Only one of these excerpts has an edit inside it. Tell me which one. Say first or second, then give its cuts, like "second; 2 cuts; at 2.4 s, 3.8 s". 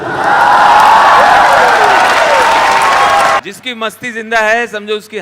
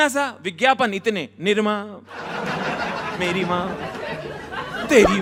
first; 1 cut; at 3.4 s